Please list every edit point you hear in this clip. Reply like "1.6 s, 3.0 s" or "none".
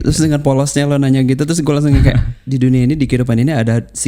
2.4 s